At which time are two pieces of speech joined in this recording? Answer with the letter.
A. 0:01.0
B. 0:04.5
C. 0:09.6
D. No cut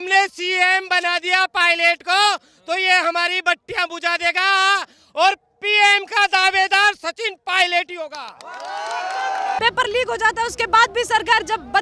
C